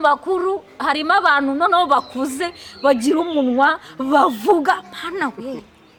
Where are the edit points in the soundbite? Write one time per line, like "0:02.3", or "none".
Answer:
none